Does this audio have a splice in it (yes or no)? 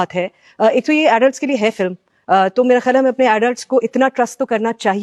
no